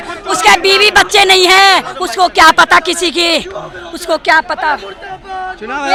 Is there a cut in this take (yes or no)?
no